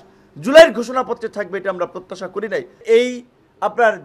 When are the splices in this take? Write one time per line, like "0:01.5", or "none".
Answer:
0:02.8